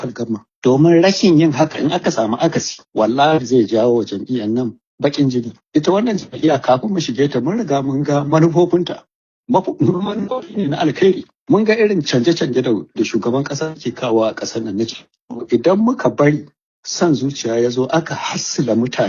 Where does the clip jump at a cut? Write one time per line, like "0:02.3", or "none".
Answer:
none